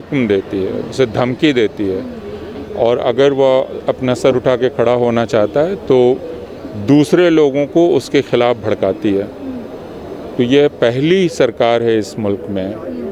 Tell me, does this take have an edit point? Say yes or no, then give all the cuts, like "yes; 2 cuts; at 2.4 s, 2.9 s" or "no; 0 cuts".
no; 0 cuts